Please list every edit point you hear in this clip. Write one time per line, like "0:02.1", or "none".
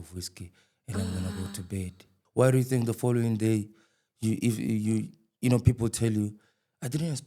0:02.2

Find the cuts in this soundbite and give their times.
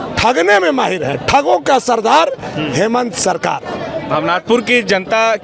none

